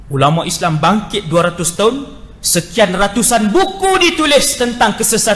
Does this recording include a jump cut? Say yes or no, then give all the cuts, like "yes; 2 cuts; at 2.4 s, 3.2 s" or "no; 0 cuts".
no; 0 cuts